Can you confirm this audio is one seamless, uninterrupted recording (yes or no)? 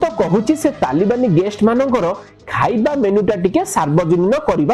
yes